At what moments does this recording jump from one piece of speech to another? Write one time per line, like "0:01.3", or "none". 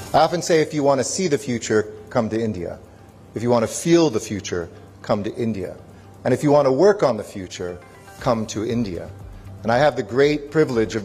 none